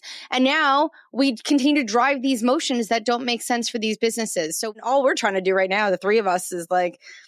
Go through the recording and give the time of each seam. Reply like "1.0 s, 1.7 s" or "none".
4.7 s